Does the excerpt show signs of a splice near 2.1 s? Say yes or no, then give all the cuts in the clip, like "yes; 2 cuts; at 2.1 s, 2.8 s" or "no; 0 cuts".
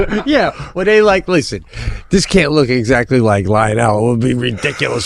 no; 0 cuts